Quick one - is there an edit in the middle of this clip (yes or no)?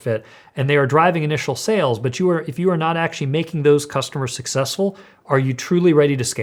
no